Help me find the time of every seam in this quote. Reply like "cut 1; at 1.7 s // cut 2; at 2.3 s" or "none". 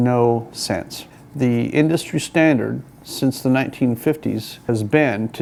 none